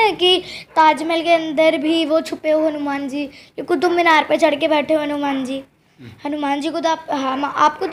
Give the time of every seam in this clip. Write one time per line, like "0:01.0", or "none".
none